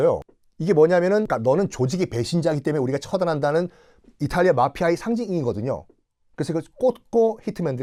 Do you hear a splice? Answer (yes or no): no